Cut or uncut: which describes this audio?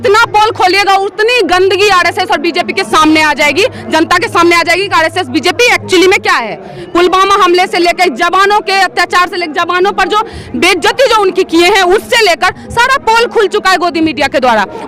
uncut